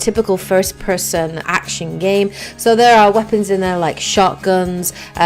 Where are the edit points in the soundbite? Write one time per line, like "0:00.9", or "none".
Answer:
0:03.4